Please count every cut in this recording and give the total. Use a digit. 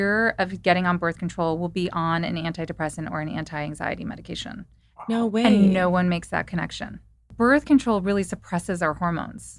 1